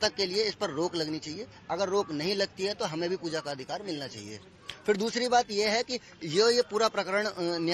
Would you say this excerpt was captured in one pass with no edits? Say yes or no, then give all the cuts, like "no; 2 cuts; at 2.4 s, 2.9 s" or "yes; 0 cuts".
no; 1 cut; at 2.5 s